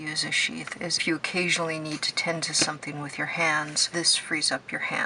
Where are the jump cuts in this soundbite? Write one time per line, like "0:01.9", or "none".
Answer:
0:01.0
0:03.8